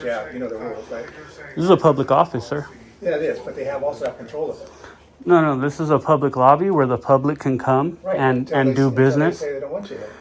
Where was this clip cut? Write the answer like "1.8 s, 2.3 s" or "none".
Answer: none